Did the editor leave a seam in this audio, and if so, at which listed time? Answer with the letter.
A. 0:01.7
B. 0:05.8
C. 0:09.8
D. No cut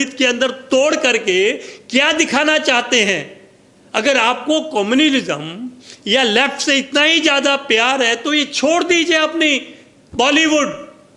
D